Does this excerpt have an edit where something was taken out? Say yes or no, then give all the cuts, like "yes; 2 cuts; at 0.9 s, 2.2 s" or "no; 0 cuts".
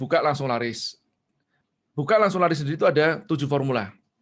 no; 0 cuts